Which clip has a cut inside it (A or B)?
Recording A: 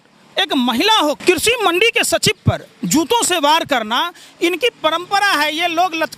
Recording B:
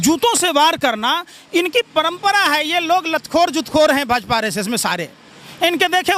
A